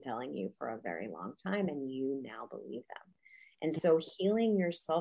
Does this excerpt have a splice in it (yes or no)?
no